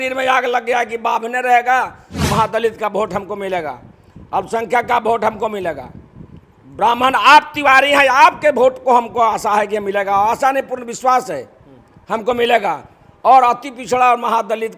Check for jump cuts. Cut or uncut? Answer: cut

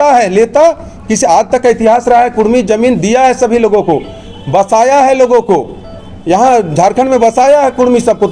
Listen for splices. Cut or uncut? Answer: uncut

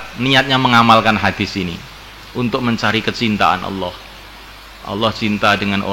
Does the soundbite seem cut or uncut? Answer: uncut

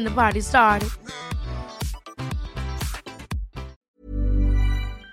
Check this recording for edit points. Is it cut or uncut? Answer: cut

